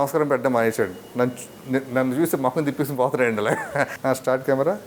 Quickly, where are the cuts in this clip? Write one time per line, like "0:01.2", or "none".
0:03.9

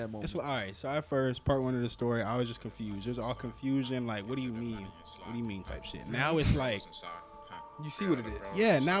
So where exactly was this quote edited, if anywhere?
none

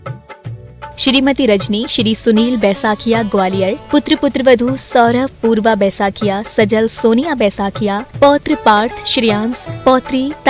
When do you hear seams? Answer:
0:01.0

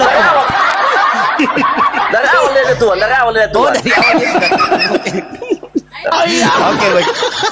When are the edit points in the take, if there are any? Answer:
0:03.7

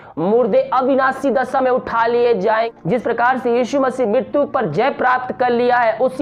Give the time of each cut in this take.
0:02.7

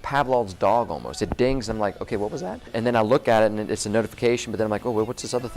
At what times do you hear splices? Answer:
0:02.7

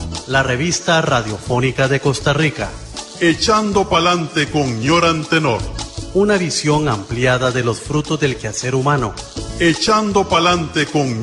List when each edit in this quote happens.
none

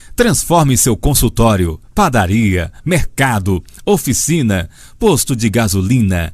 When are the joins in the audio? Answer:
0:01.8

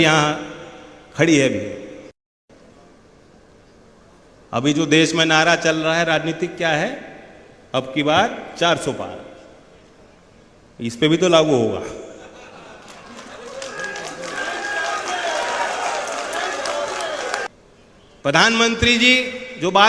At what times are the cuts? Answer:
0:17.5

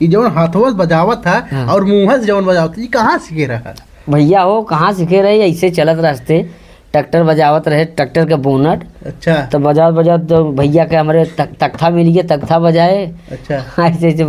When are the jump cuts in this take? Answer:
none

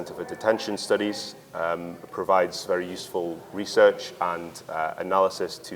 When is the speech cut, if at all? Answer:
none

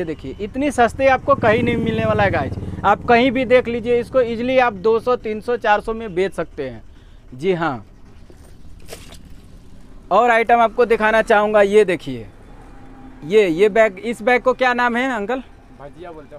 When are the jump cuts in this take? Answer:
none

